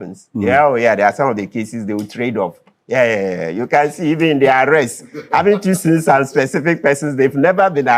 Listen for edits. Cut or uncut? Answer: uncut